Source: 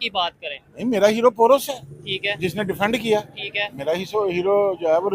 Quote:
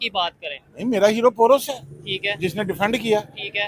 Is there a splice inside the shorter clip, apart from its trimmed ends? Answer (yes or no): no